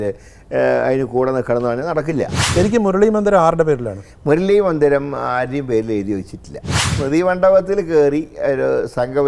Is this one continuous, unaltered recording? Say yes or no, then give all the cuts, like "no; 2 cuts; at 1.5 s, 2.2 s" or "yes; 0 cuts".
no; 2 cuts; at 2.5 s, 6.9 s